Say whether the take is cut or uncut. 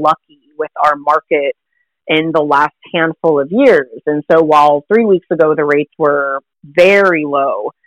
uncut